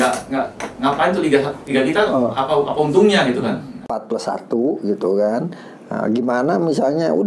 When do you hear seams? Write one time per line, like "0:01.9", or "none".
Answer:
0:04.0